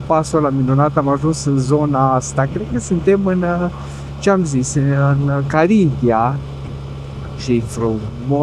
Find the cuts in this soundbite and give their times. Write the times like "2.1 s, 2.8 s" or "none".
none